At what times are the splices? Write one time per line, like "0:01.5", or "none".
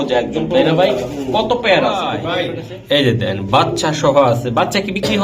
0:02.2